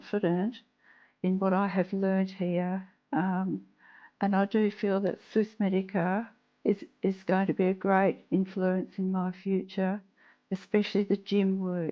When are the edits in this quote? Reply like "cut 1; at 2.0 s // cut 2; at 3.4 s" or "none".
none